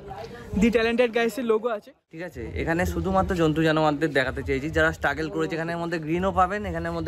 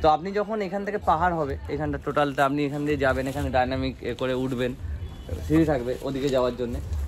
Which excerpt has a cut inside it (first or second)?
first